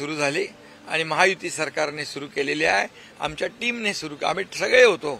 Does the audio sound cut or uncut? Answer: uncut